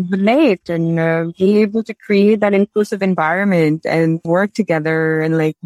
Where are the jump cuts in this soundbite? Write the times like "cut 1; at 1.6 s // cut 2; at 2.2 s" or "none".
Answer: cut 1; at 4.2 s